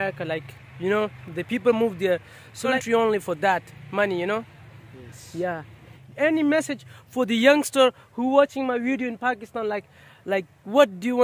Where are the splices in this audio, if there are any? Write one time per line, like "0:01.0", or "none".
0:02.8
0:05.9